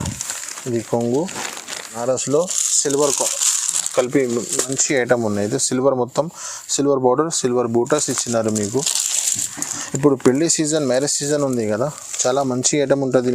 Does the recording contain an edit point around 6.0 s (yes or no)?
no